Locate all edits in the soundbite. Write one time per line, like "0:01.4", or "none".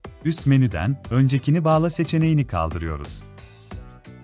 0:03.0